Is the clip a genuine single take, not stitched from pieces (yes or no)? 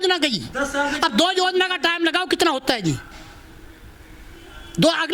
yes